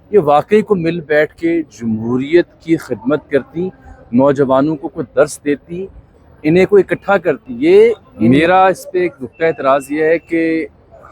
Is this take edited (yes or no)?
yes